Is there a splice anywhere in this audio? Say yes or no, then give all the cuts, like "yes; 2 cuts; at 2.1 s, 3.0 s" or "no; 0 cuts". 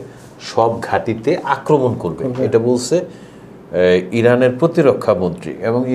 no; 0 cuts